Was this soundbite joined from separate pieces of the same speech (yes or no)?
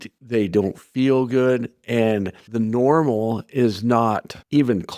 no